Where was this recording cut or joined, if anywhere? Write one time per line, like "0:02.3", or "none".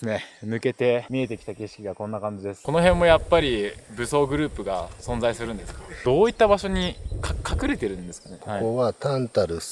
0:02.6
0:06.0
0:08.4